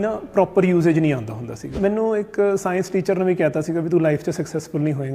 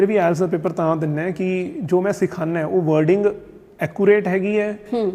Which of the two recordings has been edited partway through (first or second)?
first